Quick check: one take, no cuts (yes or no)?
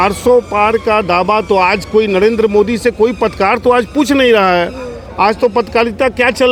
yes